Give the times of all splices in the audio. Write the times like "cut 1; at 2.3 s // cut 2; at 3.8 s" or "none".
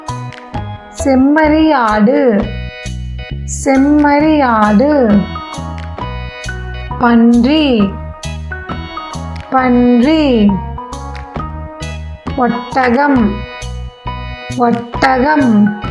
cut 1; at 8.0 s // cut 2; at 9.5 s